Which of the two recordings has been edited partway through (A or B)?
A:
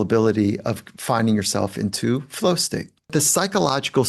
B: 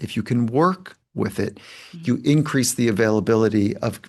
A